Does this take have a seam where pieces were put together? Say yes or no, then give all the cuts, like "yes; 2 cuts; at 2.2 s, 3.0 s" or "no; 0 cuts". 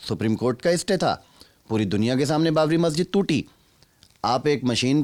no; 0 cuts